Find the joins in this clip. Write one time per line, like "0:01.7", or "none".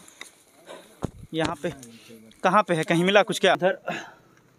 0:03.6